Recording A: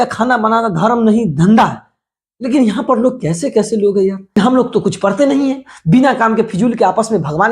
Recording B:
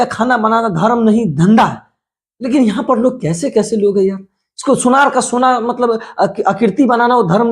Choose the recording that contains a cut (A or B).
A